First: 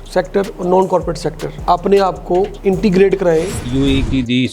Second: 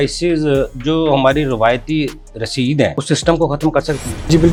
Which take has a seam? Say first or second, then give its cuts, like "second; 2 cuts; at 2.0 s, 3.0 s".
first; 1 cut; at 3.5 s